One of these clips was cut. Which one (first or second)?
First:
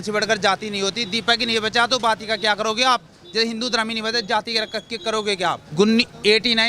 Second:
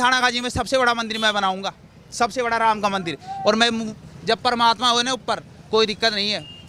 first